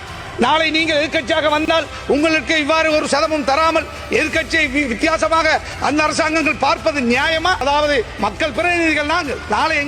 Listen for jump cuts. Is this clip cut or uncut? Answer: cut